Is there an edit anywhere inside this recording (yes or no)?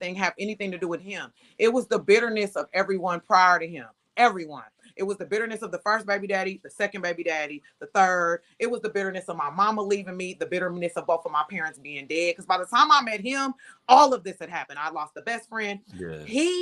no